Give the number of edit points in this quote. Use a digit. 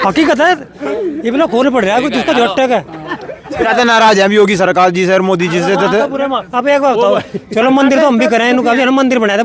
1